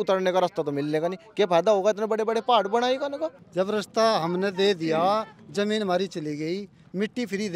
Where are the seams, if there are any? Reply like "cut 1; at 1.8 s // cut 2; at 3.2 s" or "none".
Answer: cut 1; at 3.3 s